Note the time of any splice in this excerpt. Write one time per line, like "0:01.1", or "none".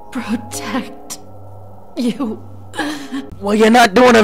0:03.3